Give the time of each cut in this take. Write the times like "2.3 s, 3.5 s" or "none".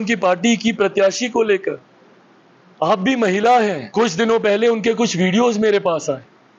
3.8 s